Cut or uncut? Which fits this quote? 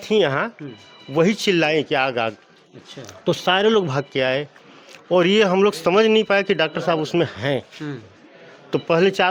uncut